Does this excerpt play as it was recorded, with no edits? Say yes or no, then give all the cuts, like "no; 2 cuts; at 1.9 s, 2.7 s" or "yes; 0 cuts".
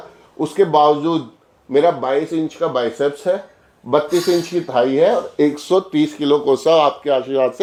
yes; 0 cuts